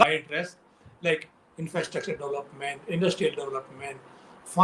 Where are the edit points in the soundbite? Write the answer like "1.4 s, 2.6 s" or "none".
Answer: none